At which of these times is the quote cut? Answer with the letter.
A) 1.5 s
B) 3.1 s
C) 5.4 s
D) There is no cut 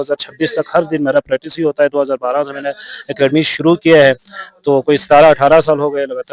D